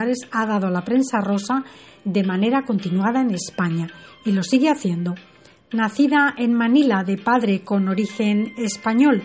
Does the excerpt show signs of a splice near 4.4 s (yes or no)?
yes